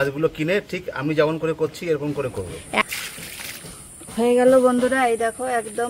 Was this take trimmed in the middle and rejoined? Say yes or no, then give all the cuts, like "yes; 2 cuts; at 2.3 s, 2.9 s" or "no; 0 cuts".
yes; 1 cut; at 2.8 s